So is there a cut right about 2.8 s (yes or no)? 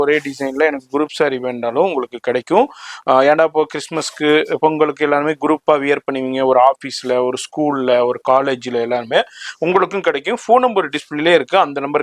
no